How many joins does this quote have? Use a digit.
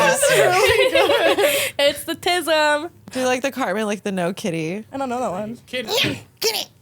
3